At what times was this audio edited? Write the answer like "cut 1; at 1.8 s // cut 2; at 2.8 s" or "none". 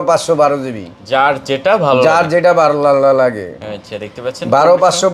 none